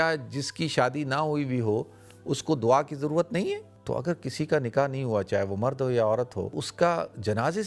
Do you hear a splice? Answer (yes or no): yes